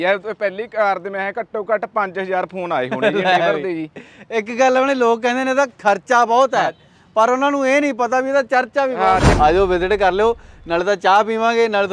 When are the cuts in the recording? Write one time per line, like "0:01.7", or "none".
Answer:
0:09.3